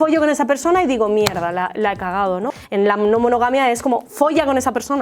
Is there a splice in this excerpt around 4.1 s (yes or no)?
no